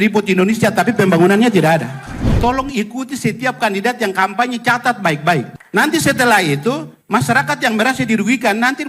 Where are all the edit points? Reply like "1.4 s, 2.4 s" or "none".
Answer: 2.4 s, 5.6 s